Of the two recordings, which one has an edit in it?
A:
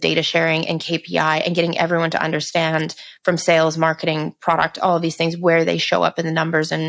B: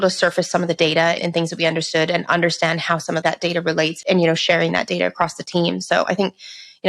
B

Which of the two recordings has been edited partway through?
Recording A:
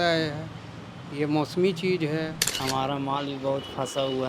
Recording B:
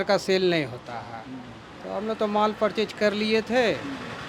A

